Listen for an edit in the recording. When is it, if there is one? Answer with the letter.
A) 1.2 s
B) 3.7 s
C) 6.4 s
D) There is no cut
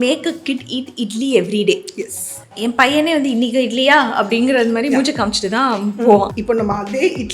C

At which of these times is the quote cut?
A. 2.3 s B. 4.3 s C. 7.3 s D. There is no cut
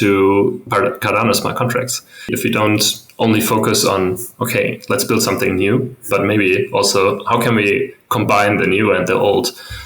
A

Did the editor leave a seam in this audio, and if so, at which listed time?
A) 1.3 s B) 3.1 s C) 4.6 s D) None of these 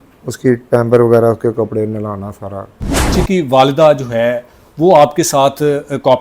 B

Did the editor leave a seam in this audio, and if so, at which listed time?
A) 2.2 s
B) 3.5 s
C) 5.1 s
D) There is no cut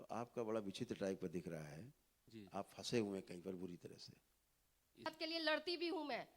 C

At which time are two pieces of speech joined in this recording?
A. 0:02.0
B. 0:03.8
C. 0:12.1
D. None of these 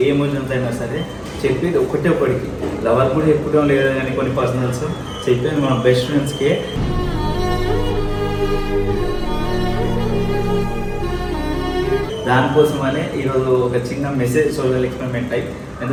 D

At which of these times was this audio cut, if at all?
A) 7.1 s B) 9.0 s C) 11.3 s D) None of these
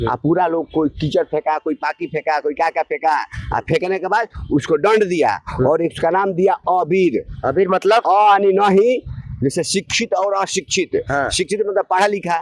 D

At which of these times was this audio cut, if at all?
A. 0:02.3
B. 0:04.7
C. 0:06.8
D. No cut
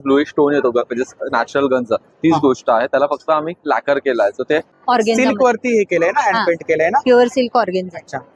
B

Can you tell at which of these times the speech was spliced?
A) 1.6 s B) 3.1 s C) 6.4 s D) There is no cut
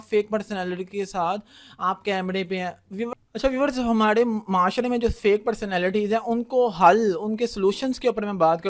B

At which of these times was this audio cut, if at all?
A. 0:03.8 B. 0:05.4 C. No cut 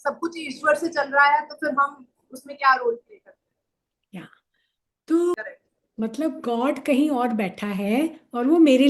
B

